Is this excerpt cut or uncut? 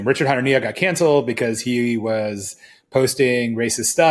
uncut